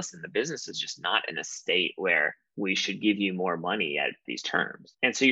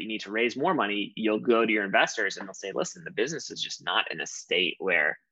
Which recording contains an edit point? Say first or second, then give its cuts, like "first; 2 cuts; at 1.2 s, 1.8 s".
first; 1 cut; at 4.4 s